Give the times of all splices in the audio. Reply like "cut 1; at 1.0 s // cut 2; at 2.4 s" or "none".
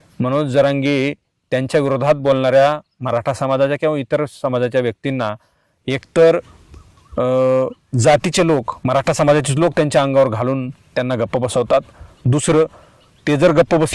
none